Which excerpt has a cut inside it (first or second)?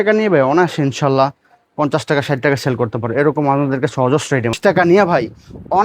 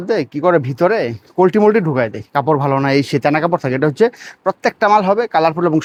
first